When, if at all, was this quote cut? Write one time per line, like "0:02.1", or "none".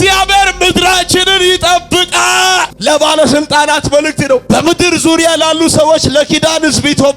0:02.7